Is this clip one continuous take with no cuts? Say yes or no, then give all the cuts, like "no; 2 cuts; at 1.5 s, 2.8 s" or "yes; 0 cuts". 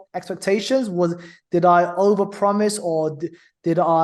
yes; 0 cuts